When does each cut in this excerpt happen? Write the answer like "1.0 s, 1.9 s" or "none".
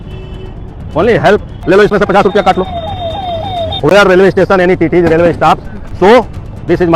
1.5 s